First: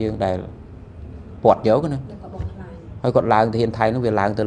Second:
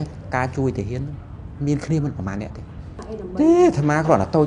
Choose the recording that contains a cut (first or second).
second